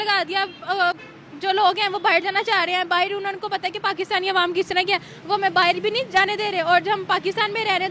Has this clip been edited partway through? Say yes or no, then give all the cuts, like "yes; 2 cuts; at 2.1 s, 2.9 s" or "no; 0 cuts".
no; 0 cuts